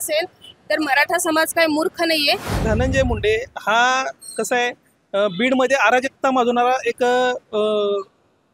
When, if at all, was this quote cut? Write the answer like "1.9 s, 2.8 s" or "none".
2.6 s